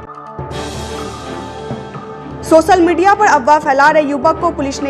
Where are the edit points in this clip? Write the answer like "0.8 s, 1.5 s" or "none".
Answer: 2.0 s